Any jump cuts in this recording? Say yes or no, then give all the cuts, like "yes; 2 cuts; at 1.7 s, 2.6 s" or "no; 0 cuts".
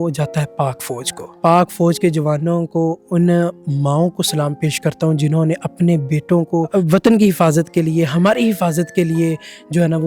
yes; 2 cuts; at 1.3 s, 6.7 s